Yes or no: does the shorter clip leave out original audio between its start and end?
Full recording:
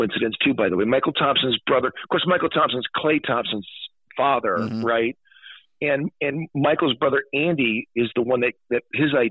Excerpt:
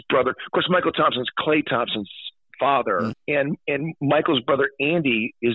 yes